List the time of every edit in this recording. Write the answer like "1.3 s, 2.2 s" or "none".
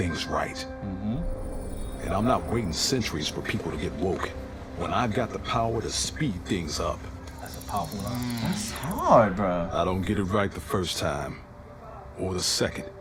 none

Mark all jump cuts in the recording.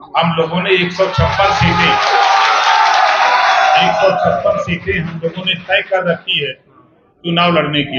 none

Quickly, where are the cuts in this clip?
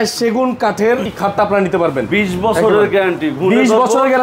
1.1 s

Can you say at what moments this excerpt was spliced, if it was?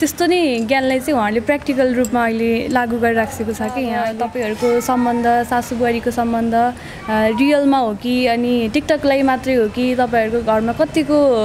4.0 s

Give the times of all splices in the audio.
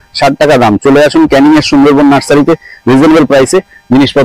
none

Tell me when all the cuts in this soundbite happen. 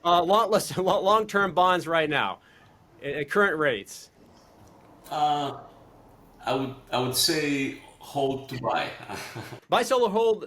9.5 s

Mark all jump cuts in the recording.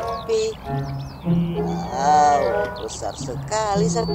1.0 s

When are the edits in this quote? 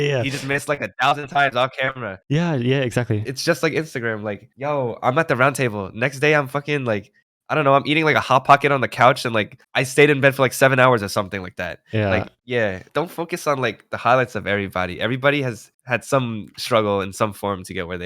3.3 s, 12.9 s, 16.5 s

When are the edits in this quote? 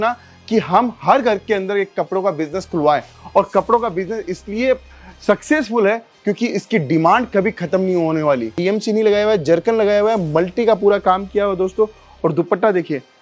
8.5 s

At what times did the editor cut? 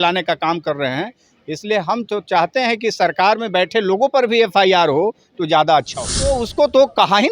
6.3 s

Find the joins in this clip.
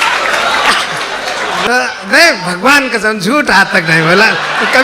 1.6 s

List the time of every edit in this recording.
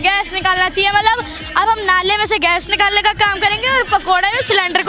1.4 s

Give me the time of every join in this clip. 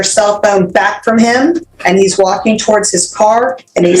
1.7 s

